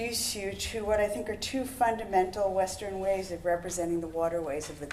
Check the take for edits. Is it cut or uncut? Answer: cut